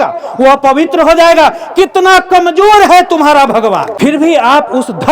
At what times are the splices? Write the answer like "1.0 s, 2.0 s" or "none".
3.9 s